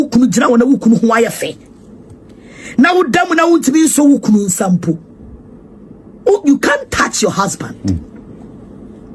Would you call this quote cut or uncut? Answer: uncut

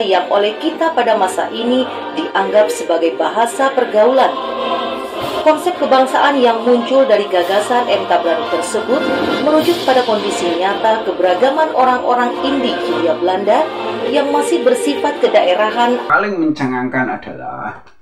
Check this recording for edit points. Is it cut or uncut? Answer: cut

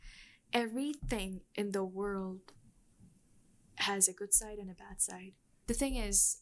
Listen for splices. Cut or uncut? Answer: cut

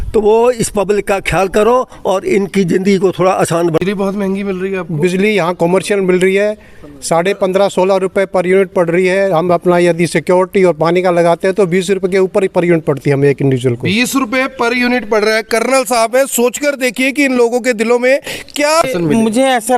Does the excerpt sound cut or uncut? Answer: cut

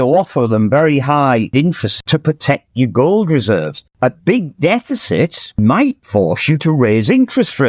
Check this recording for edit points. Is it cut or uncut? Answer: cut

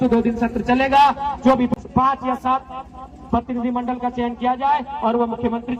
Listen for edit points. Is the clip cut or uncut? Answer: cut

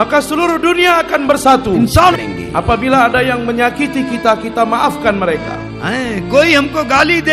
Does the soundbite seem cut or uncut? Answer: cut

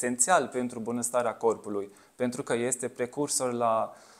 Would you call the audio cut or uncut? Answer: uncut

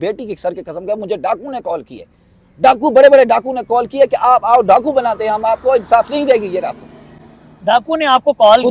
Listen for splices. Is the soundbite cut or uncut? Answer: uncut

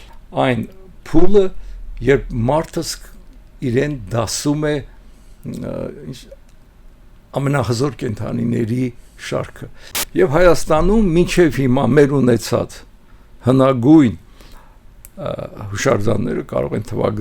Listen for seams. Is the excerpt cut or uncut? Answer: cut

